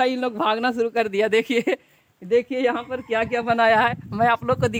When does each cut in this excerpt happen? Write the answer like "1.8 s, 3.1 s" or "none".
none